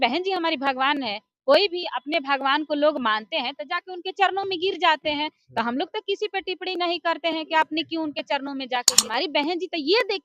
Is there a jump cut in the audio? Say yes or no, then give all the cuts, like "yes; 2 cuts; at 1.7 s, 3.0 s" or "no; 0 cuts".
yes; 1 cut; at 9.0 s